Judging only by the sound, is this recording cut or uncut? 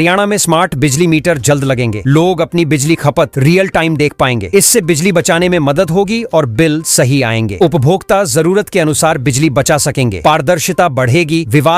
uncut